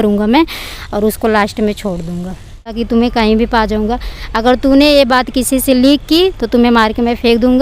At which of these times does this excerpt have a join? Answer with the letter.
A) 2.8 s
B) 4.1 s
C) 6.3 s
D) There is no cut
A